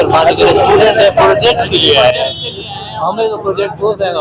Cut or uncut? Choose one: uncut